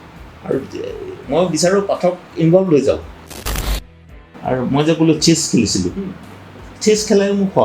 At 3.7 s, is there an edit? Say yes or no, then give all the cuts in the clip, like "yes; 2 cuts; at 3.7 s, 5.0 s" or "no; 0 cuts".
yes; 1 cut; at 3.7 s